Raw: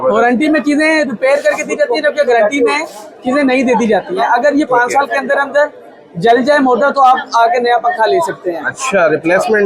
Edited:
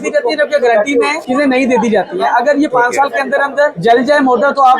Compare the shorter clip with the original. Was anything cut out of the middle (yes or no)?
yes